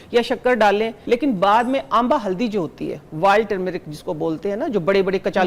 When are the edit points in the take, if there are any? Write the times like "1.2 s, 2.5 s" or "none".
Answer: 1.0 s